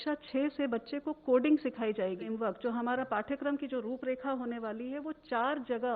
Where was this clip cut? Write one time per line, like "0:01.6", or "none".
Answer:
0:02.2